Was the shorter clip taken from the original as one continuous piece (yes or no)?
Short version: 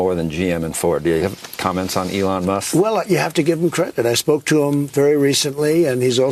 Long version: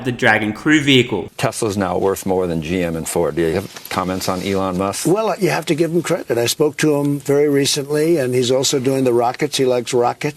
yes